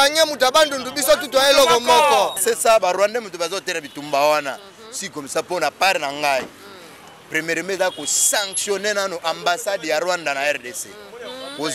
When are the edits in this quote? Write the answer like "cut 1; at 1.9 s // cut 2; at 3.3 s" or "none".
cut 1; at 2.4 s